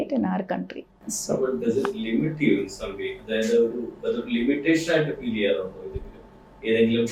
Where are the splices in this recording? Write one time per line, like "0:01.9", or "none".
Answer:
none

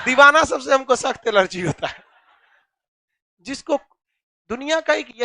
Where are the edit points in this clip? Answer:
none

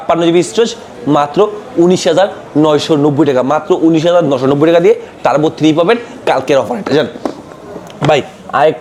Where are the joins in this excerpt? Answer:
none

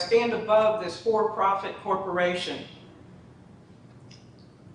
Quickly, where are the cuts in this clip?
none

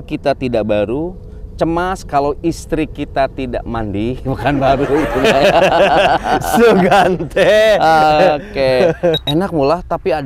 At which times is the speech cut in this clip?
0:09.2

